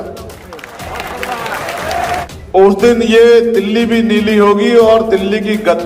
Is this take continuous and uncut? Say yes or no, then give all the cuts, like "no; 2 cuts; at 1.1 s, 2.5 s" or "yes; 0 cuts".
no; 1 cut; at 2.3 s